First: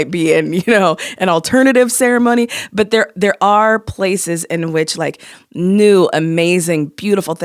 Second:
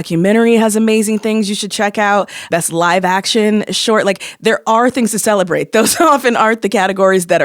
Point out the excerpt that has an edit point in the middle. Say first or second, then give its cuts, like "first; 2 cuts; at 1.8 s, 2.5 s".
second; 1 cut; at 2.5 s